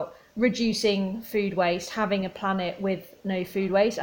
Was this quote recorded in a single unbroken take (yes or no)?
yes